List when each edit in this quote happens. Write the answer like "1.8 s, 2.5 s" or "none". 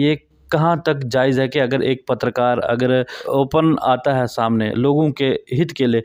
3.2 s